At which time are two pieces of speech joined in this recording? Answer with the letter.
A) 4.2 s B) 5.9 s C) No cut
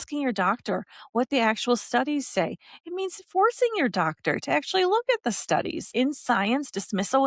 B